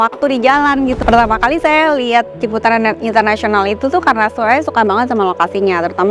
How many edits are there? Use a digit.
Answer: 1